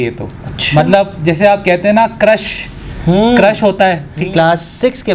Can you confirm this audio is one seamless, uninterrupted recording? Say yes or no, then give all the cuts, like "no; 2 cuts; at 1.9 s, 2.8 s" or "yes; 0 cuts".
no; 1 cut; at 4.2 s